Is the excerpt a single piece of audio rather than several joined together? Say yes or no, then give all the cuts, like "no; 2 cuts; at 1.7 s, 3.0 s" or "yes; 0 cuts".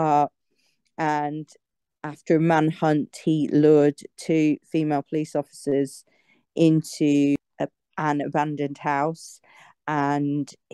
no; 1 cut; at 7.4 s